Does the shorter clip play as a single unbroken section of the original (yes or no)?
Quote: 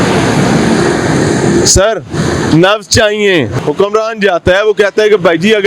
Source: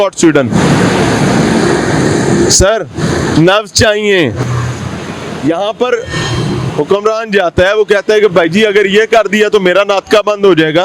no